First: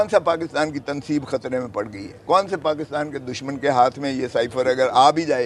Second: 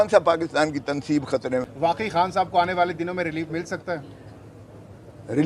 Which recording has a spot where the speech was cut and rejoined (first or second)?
second